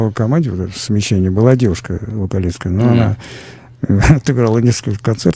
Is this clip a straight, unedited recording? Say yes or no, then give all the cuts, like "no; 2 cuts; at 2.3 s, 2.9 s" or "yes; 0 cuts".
yes; 0 cuts